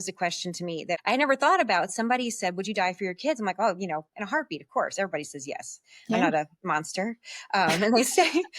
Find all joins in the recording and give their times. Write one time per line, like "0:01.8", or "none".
0:01.0

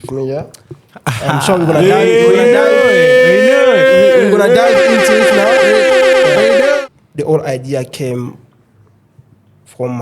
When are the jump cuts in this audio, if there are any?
0:06.8

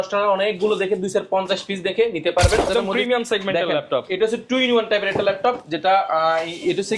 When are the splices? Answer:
0:02.7

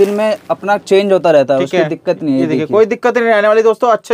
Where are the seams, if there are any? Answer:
none

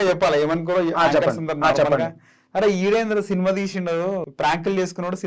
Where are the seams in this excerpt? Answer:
0:04.3

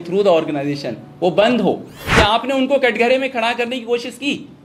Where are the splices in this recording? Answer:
0:02.0

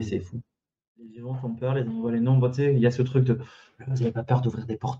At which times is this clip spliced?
0:01.2

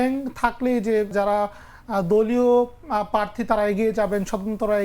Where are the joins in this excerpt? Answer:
0:01.1

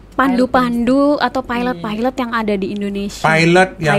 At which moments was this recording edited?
none

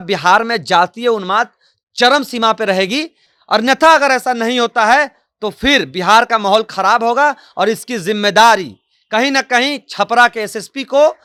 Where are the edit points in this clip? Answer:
none

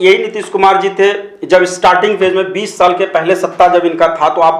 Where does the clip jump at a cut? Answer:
none

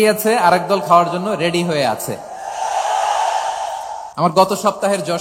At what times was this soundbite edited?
0:04.0

